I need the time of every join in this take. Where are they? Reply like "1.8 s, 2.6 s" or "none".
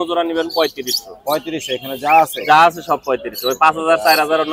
none